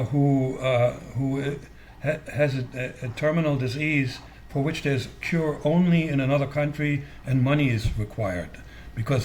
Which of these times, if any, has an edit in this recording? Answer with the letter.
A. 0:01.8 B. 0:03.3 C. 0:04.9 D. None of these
D